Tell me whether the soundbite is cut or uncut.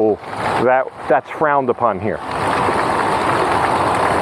uncut